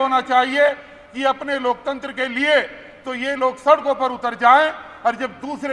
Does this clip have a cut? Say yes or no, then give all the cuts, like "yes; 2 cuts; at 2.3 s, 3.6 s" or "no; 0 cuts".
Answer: no; 0 cuts